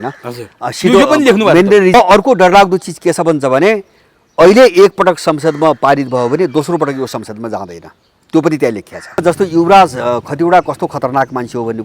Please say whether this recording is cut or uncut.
cut